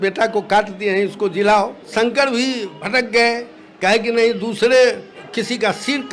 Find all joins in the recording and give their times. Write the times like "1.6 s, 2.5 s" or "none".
1.9 s, 2.7 s, 5.1 s